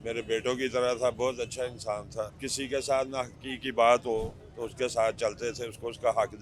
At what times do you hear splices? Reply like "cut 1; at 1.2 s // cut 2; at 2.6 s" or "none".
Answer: cut 1; at 2.4 s